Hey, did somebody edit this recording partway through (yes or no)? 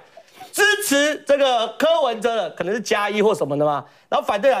no